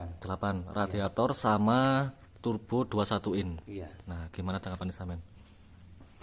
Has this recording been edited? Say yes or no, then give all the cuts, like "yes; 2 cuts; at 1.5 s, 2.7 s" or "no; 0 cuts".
no; 0 cuts